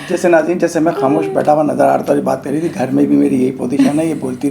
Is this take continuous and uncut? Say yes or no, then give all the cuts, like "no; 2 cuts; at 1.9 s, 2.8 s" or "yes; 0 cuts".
yes; 0 cuts